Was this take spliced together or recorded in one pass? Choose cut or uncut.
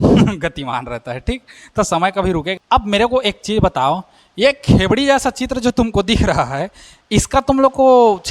cut